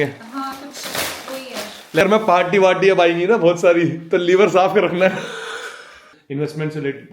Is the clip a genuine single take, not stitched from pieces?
no; 2 cuts; at 2.0 s, 6.1 s

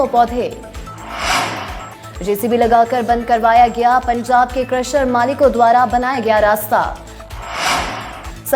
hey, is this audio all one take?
no; 2 cuts; at 1.0 s, 7.1 s

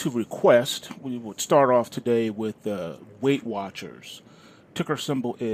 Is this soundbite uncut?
no; 1 cut; at 4.6 s

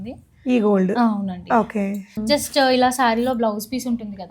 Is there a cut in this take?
yes; 1 cut; at 2.2 s

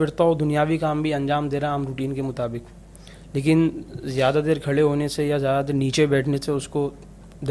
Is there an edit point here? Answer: no; 0 cuts

